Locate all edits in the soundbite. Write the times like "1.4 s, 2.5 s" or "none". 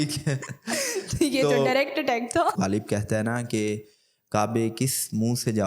2.6 s